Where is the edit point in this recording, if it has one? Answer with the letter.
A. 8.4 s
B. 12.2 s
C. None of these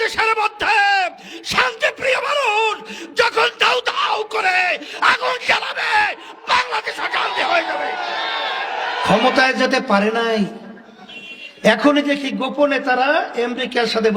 A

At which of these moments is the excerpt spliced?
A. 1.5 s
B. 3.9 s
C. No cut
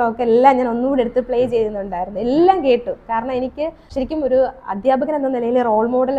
B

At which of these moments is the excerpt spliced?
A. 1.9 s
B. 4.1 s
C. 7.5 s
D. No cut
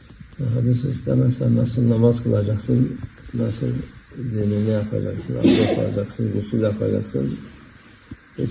C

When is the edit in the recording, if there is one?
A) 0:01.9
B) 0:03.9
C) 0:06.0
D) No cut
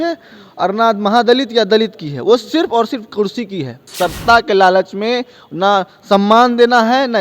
B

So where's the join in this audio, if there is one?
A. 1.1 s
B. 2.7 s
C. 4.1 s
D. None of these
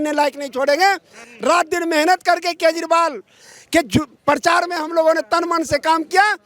A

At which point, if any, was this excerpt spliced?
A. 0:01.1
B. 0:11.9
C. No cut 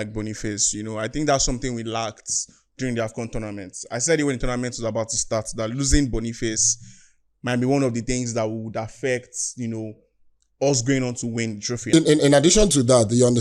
B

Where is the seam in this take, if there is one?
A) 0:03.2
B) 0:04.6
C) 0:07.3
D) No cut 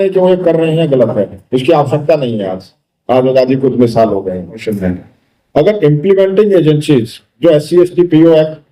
B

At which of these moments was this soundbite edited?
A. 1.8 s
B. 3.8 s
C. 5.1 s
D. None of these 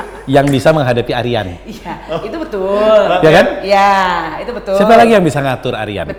D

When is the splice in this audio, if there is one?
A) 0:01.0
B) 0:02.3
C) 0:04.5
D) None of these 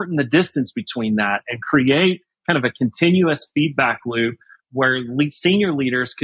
C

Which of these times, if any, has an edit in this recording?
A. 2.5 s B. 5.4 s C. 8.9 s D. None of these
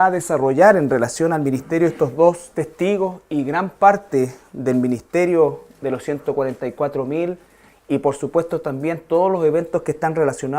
B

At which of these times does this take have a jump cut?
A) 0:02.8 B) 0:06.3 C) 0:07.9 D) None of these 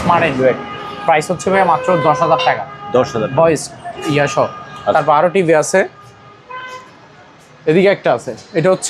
D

